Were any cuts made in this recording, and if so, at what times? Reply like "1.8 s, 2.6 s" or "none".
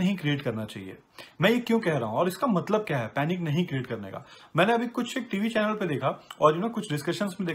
none